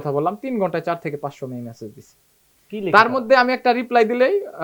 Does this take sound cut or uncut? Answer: uncut